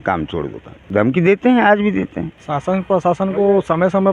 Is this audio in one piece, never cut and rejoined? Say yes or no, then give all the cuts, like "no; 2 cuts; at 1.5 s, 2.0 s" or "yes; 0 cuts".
no; 2 cuts; at 0.8 s, 2.3 s